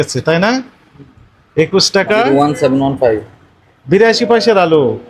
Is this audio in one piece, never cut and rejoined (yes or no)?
yes